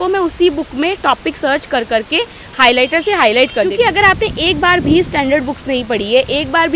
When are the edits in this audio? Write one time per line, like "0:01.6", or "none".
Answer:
0:03.7